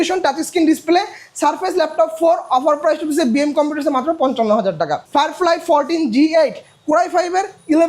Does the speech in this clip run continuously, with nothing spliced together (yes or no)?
no